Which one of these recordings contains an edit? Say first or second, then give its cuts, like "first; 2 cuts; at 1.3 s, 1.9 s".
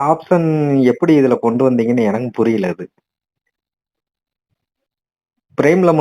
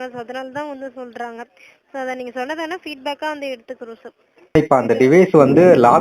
second; 1 cut; at 4.6 s